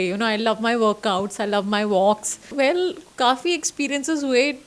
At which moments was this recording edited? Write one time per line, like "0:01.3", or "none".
0:02.5